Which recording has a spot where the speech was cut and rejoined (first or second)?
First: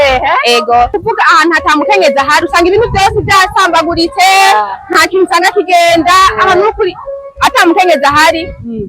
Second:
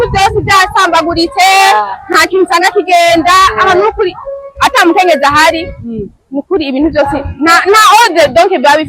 first